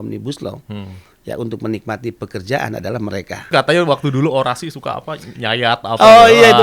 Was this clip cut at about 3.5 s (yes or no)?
yes